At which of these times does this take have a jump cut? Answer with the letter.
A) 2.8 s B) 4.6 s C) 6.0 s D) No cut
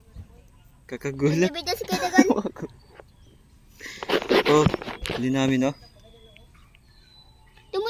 D